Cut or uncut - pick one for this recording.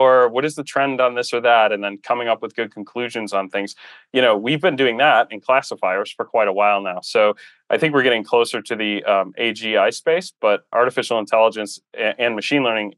cut